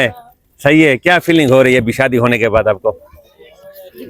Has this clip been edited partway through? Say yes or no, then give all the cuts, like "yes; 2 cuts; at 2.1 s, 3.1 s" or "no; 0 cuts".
no; 0 cuts